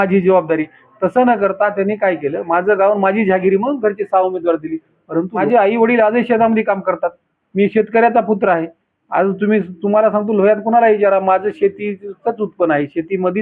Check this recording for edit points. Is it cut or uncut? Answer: cut